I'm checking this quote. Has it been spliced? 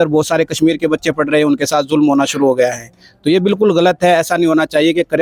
no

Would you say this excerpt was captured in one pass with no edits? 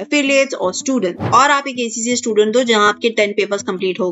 no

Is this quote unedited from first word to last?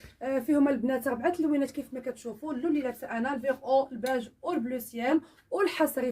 no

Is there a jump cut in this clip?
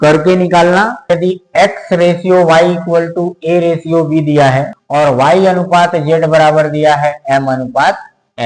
yes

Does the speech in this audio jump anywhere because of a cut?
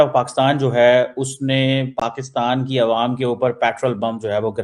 no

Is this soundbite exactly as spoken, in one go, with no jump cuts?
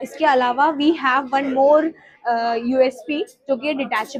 yes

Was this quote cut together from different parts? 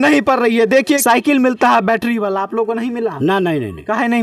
yes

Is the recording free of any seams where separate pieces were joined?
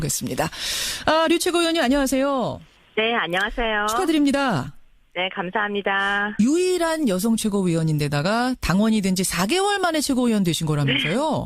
no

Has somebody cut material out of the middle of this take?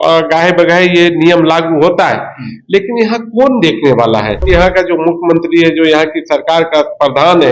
yes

